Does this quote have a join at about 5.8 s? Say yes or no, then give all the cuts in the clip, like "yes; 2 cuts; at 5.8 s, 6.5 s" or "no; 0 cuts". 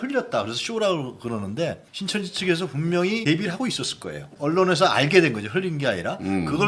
no; 2 cuts; at 1.9 s, 4.3 s